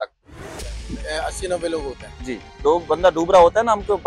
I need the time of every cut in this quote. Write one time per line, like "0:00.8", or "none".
0:02.5